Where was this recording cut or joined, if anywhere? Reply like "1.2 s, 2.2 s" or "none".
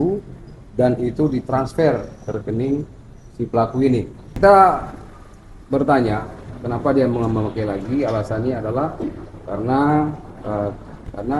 4.2 s